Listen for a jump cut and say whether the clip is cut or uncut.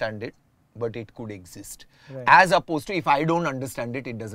uncut